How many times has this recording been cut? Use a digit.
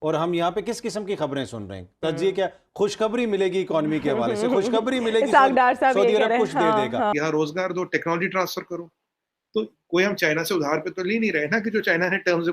1